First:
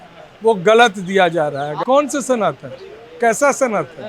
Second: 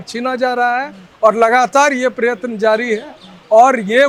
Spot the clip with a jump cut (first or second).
first